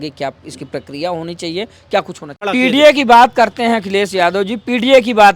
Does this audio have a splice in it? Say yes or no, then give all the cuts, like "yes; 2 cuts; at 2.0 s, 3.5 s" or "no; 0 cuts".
yes; 1 cut; at 2.4 s